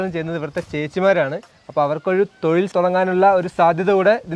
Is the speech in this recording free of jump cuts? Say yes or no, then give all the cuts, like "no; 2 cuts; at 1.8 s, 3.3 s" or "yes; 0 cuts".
no; 1 cut; at 2.7 s